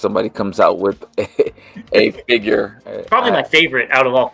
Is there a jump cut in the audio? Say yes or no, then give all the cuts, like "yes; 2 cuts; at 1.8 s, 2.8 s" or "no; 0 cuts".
yes; 1 cut; at 3.0 s